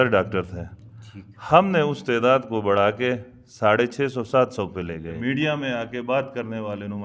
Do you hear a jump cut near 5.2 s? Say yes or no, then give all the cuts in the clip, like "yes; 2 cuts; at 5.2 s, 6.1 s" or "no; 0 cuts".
yes; 1 cut; at 5.2 s